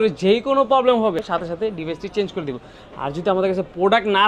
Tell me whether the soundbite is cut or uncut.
cut